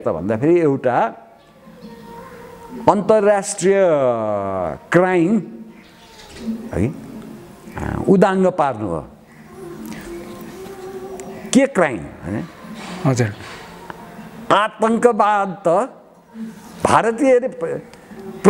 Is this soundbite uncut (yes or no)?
yes